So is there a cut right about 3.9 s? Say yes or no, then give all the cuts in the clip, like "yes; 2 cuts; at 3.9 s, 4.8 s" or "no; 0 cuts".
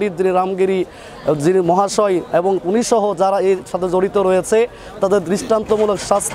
no; 0 cuts